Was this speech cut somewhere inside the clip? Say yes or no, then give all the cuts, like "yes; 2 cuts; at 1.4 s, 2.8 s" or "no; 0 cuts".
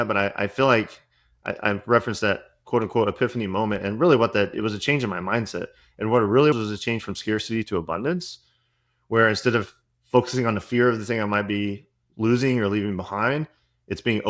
yes; 1 cut; at 6.5 s